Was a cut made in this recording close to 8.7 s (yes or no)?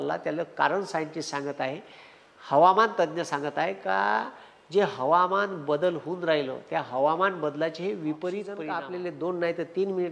yes